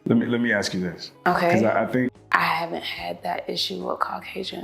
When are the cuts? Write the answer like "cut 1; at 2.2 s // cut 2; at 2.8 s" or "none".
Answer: cut 1; at 2.2 s